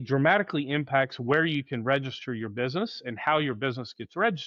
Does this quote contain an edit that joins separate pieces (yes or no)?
no